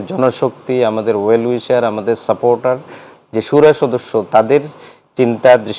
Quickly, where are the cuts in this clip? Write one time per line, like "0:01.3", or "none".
none